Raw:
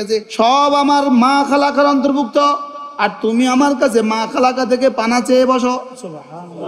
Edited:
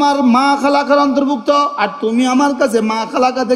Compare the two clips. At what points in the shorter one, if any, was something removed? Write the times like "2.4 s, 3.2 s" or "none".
1.8 s